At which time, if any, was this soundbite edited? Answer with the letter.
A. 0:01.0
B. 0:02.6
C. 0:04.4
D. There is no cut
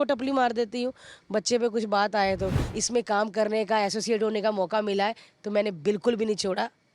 B